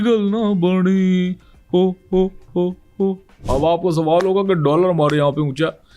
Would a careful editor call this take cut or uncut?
cut